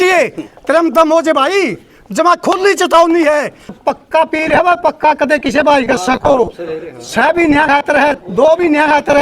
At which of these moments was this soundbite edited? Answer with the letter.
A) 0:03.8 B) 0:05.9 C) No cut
A